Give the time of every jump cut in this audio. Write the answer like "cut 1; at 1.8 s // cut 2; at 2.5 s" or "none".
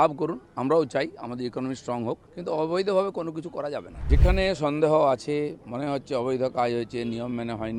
cut 1; at 2.3 s // cut 2; at 3.9 s